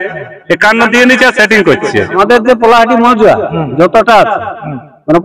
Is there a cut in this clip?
yes; 1 cut; at 2.2 s

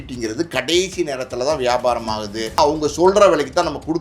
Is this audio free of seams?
no; 1 cut; at 2.6 s

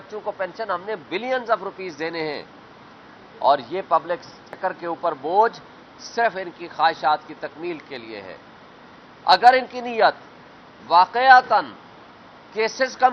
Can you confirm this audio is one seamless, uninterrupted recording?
no; 1 cut; at 4.5 s

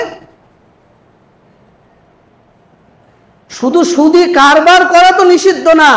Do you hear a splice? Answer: no; 0 cuts

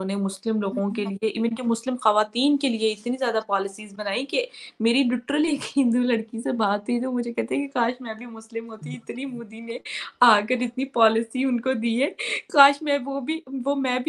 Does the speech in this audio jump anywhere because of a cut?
no; 0 cuts

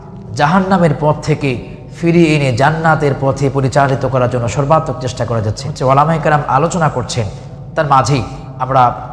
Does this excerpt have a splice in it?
yes; 1 cut; at 5.7 s

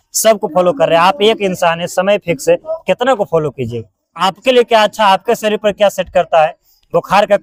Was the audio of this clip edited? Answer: no; 0 cuts

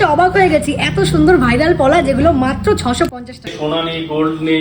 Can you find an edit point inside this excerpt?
yes; 1 cut; at 3.5 s

